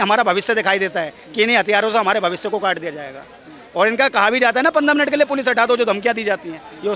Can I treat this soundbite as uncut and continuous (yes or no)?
yes